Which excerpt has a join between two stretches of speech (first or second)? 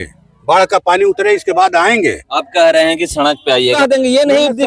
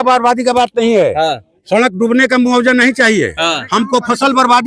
first